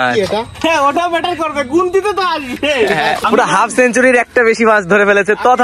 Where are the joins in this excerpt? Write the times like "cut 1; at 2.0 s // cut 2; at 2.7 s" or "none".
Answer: cut 1; at 3.2 s